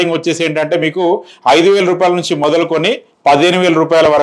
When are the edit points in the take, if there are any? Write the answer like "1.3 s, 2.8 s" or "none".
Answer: none